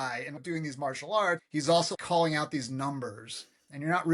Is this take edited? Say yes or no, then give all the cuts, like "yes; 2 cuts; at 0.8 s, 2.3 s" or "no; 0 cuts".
yes; 1 cut; at 1.4 s